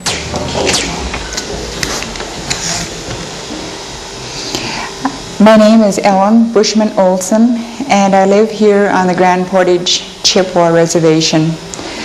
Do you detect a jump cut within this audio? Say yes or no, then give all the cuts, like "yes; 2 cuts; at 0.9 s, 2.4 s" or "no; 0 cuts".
no; 0 cuts